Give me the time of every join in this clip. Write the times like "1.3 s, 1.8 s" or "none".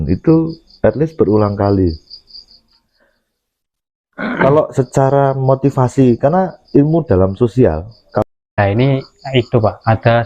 8.2 s